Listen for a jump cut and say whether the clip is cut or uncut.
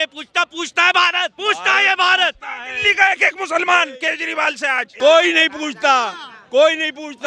cut